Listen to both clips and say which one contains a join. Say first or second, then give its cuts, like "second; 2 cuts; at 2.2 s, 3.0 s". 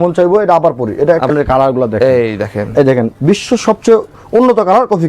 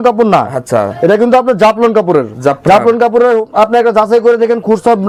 first; 1 cut; at 1.3 s